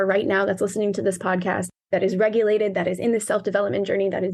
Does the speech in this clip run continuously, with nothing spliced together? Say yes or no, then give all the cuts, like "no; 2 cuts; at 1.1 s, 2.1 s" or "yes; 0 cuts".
no; 1 cut; at 1.7 s